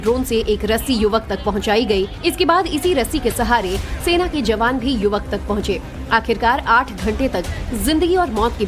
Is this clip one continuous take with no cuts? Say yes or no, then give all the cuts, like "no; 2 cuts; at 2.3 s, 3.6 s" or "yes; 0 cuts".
no; 1 cut; at 7.3 s